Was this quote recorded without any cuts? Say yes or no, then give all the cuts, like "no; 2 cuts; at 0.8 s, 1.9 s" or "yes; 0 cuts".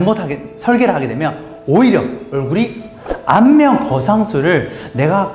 no; 1 cut; at 2.9 s